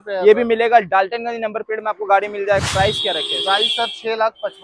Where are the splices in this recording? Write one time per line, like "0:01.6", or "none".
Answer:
0:02.6